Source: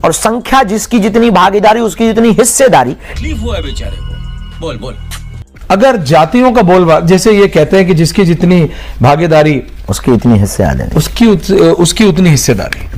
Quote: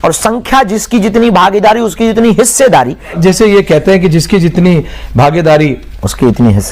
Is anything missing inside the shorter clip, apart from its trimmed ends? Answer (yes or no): yes